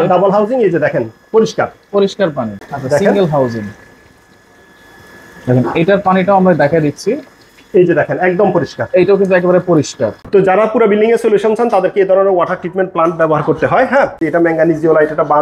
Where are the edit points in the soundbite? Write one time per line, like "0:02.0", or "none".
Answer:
0:02.7
0:10.2
0:14.2

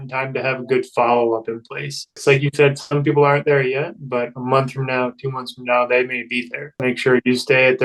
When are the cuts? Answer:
0:02.2
0:06.8

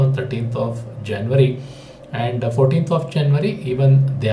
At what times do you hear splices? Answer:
none

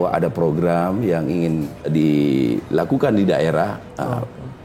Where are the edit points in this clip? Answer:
0:01.9

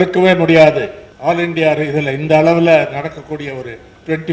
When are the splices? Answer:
0:01.0

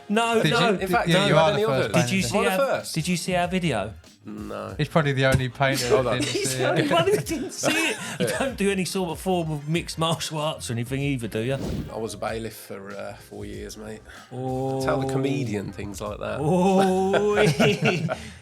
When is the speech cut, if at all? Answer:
0:08.2
0:11.7

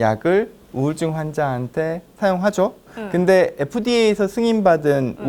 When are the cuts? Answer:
0:02.9

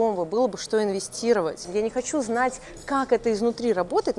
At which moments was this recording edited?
0:01.6

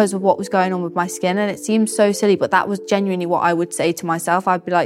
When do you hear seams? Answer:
none

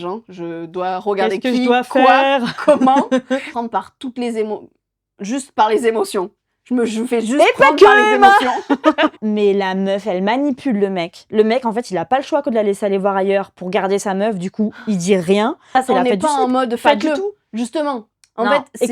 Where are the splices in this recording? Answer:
0:03.5
0:09.2
0:15.7

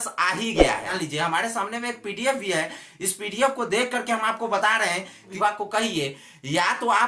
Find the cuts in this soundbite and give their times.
0:00.9
0:05.3

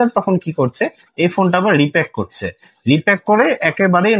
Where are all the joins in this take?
none

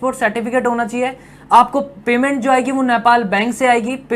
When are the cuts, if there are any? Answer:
none

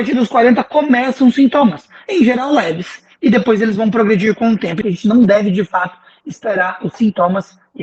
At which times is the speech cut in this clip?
0:04.8

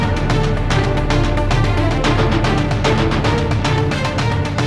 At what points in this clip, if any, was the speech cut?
none

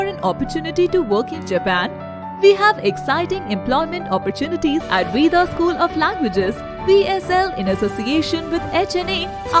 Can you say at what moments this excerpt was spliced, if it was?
0:04.9

